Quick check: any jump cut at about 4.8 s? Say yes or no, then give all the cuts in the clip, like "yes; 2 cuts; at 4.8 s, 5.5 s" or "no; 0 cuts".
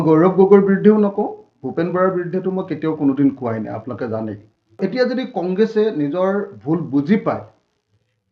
yes; 1 cut; at 4.8 s